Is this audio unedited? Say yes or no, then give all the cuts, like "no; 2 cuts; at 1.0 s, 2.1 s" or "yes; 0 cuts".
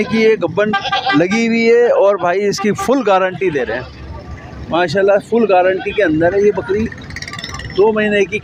yes; 0 cuts